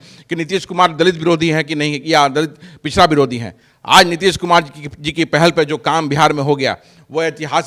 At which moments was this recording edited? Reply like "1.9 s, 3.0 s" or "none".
none